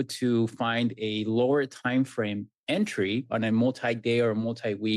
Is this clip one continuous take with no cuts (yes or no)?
no